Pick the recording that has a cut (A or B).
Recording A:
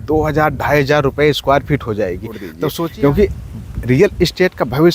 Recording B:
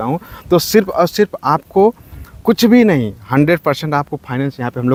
A